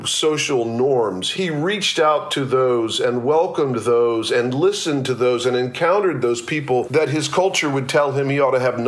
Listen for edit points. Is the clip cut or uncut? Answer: cut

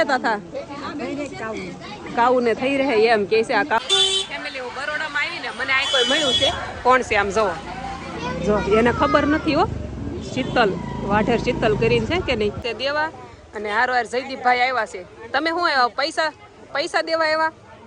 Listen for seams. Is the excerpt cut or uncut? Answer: cut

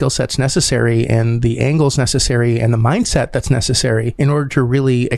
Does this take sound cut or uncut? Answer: cut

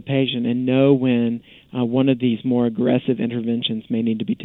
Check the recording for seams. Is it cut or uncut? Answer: uncut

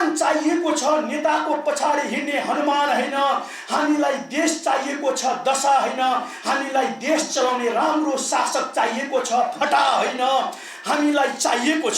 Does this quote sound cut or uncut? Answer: uncut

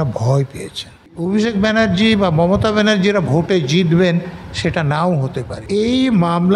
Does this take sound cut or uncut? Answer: cut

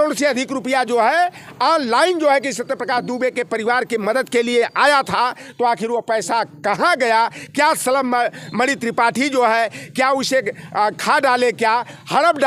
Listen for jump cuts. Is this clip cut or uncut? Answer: uncut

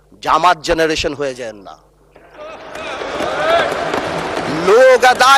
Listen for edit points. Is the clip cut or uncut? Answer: uncut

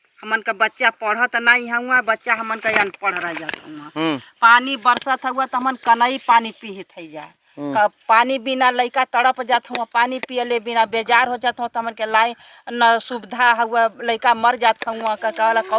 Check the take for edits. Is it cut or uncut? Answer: uncut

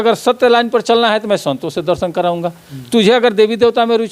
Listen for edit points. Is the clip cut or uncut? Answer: uncut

